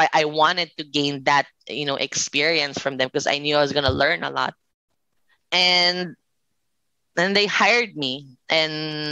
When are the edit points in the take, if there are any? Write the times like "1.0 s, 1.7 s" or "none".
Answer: none